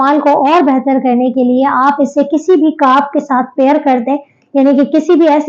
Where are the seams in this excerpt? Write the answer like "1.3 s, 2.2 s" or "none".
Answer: none